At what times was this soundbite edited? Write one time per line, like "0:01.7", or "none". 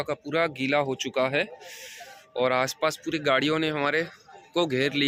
none